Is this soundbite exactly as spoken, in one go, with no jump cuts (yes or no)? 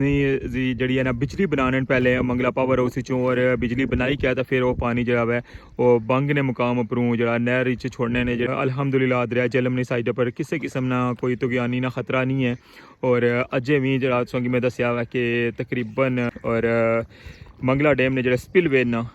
no